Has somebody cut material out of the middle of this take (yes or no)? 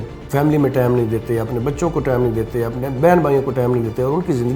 no